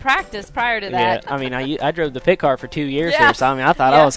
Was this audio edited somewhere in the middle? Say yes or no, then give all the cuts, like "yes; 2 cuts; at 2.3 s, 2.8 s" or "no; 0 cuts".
yes; 1 cut; at 1.3 s